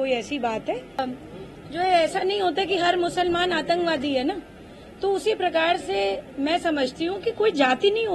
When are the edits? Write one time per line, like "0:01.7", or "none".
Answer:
0:01.0